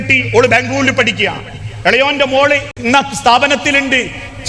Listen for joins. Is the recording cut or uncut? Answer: uncut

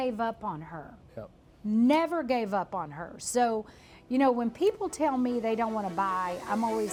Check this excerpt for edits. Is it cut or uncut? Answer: uncut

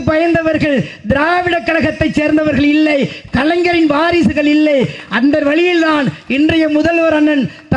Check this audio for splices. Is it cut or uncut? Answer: uncut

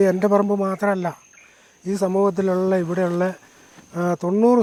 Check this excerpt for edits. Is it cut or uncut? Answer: uncut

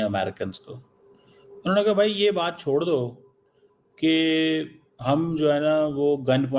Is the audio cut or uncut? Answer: uncut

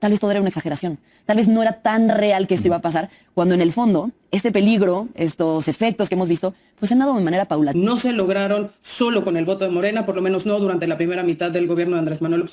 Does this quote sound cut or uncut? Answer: cut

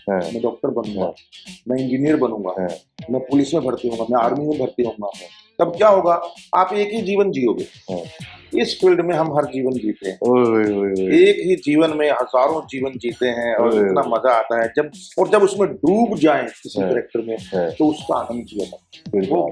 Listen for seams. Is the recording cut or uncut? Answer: uncut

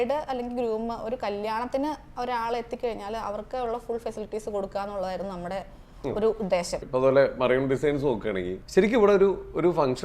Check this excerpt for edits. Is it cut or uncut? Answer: cut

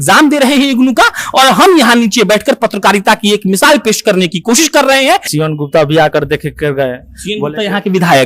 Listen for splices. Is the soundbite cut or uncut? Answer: cut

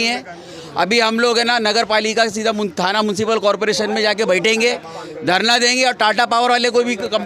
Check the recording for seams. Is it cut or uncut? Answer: uncut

